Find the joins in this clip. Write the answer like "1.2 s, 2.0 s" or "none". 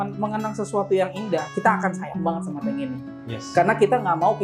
1.5 s